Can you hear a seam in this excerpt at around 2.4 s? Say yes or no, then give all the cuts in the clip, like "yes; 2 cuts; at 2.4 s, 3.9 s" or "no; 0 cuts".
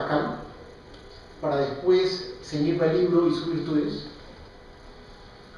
no; 1 cut; at 4.4 s